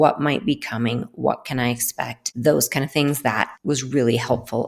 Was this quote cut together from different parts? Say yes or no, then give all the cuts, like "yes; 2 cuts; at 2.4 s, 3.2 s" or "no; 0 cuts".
yes; 2 cuts; at 2.2 s, 3.5 s